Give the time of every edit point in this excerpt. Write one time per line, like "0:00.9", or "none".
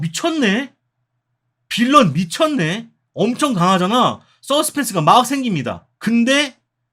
0:05.8